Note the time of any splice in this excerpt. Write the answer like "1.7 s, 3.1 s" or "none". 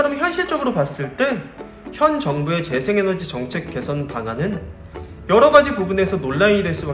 none